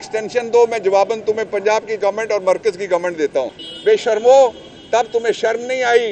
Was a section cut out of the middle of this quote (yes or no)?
yes